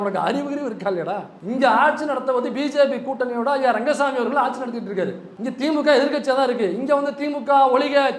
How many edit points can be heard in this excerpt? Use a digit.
2